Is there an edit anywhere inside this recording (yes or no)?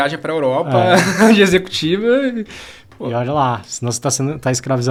no